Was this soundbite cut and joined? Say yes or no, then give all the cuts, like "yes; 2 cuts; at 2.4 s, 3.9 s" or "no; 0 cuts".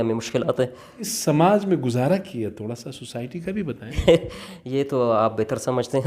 yes; 2 cuts; at 1.1 s, 4.0 s